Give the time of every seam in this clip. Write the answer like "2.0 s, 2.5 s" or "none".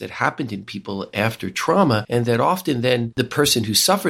2.0 s, 3.1 s